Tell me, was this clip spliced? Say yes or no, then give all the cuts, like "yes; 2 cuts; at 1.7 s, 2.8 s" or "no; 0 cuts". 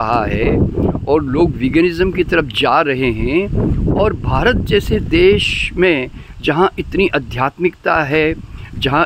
no; 0 cuts